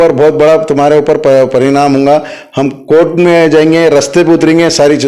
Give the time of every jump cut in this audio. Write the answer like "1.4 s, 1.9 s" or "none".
none